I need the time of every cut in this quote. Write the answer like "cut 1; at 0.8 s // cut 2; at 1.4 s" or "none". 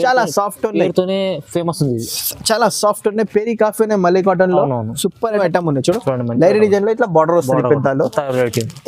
cut 1; at 5.4 s